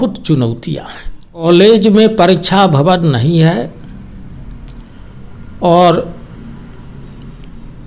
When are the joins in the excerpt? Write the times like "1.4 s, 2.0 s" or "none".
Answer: 1.5 s